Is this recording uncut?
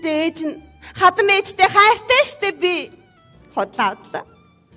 no; 1 cut; at 2.5 s

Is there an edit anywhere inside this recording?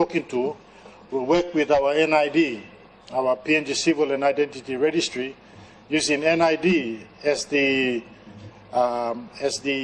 no; 0 cuts

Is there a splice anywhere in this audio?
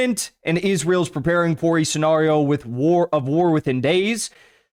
no; 0 cuts

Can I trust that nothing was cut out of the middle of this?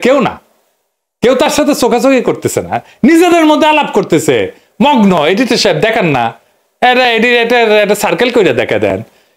yes; 0 cuts

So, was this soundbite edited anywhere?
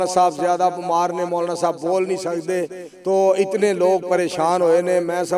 no; 0 cuts

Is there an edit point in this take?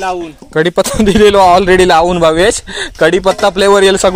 no; 0 cuts

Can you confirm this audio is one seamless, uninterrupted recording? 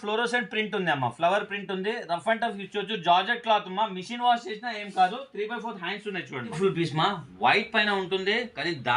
no; 1 cut; at 6.6 s

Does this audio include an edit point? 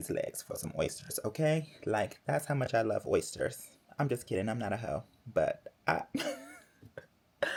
no; 0 cuts

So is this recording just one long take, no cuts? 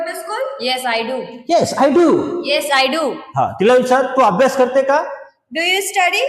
yes; 0 cuts

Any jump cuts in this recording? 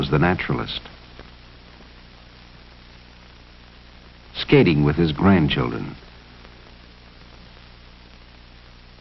no; 0 cuts

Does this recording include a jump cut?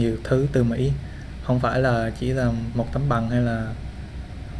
no; 0 cuts

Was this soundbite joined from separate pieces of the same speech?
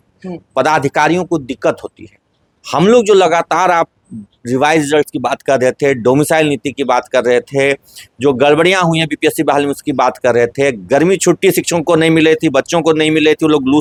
no; 0 cuts

